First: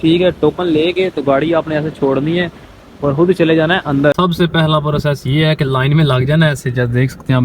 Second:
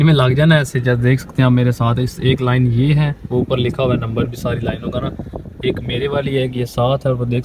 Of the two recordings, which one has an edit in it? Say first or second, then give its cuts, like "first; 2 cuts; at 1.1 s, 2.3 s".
first; 1 cut; at 4.1 s